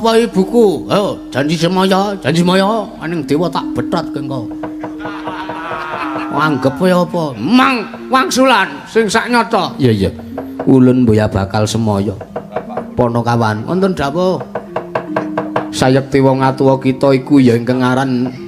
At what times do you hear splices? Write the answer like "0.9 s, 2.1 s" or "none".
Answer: none